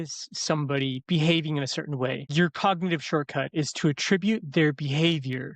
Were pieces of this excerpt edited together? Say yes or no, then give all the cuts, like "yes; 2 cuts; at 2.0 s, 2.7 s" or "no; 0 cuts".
yes; 1 cut; at 2.2 s